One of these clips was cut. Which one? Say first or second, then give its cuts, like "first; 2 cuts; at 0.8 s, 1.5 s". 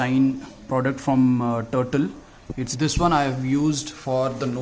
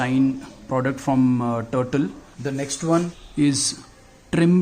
second; 2 cuts; at 2.3 s, 3.2 s